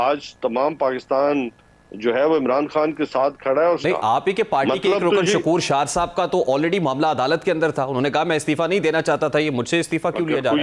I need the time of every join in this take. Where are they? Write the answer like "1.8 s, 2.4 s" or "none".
3.8 s